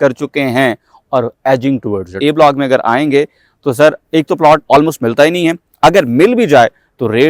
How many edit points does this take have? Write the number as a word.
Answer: one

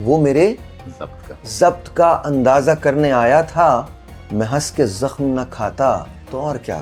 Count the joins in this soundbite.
zero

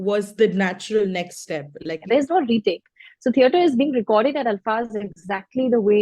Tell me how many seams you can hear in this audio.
one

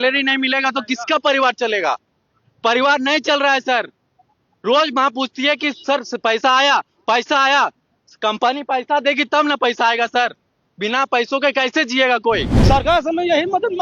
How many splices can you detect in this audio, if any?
one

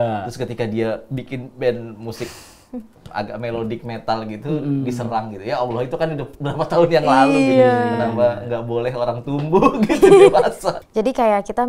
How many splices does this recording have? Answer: one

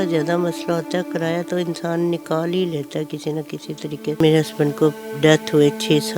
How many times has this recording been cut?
one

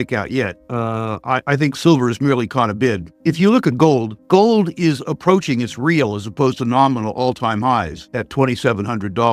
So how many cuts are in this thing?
zero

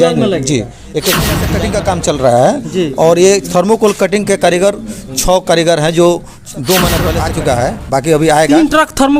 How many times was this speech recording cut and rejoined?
two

